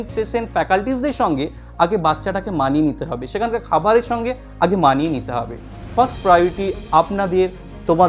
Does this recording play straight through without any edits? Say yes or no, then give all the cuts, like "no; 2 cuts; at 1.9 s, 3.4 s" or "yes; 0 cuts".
yes; 0 cuts